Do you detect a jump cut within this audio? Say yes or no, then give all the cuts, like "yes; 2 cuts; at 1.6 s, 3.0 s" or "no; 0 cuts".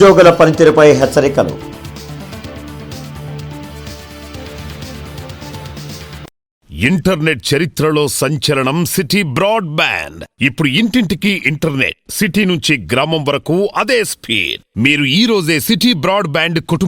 yes; 1 cut; at 6.7 s